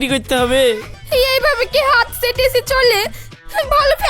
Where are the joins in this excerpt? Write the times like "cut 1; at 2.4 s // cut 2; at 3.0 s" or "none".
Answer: cut 1; at 0.9 s